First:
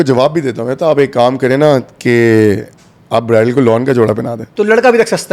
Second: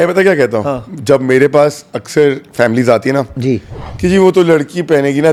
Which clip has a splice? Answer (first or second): first